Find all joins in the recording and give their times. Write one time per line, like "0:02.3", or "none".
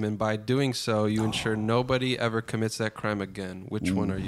none